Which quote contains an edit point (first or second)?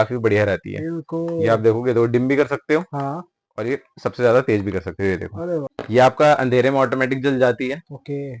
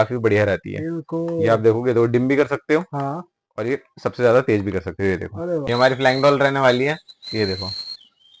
second